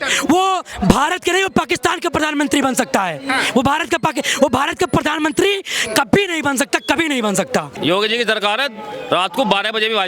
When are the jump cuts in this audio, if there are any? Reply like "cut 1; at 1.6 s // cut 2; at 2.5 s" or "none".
cut 1; at 7.8 s